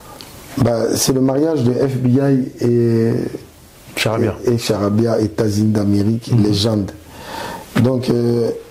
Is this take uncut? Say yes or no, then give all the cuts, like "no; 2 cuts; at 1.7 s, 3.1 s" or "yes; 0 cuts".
yes; 0 cuts